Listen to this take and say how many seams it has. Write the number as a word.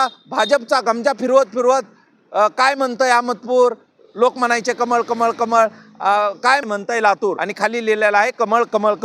two